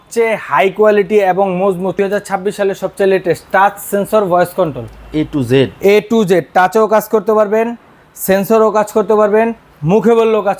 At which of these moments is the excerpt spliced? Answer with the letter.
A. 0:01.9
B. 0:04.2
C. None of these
A